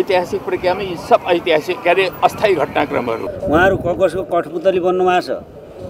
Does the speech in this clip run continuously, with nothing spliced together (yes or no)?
no